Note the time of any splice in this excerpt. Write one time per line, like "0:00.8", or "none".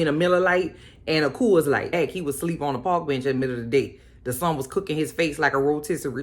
0:01.9